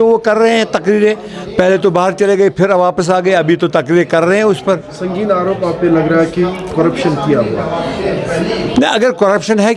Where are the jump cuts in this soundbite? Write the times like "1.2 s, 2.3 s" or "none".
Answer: none